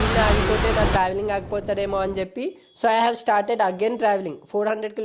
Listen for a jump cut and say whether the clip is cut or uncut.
uncut